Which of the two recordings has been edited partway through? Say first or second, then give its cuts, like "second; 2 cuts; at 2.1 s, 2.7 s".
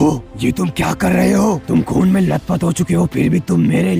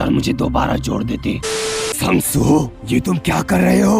second; 1 cut; at 1.5 s